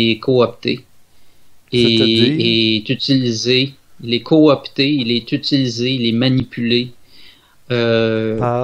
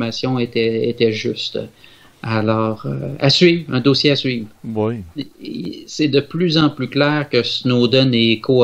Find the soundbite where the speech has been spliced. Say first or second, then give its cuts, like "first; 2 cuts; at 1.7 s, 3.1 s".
second; 1 cut; at 5.1 s